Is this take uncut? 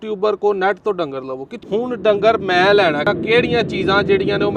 no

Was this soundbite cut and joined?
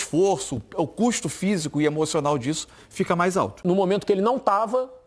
yes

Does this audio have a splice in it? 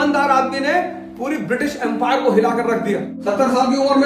yes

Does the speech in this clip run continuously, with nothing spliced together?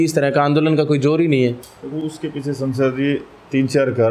yes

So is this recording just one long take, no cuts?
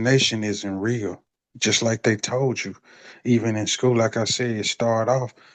yes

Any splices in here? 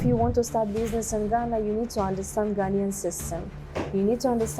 no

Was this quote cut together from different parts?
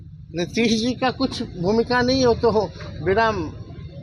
no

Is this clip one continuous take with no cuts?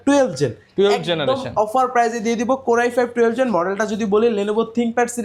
yes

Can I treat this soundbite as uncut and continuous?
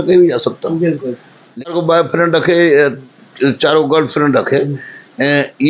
no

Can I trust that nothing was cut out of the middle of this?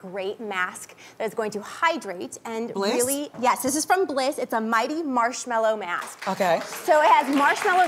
yes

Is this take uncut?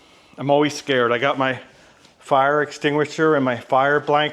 yes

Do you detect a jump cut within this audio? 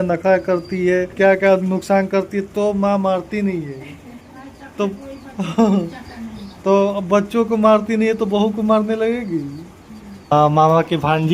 yes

